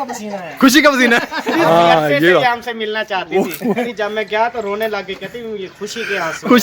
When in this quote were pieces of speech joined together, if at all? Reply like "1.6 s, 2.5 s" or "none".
1.6 s, 3.8 s